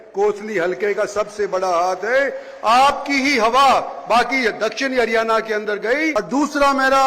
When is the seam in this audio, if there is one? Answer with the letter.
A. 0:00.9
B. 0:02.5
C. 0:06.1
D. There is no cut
C